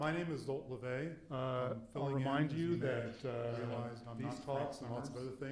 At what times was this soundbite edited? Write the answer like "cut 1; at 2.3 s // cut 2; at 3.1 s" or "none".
cut 1; at 1.2 s